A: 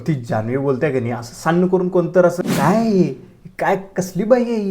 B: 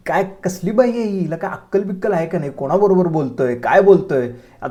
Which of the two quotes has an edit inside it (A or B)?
A